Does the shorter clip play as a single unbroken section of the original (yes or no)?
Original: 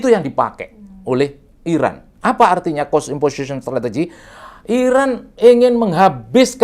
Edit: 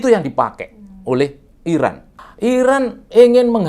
no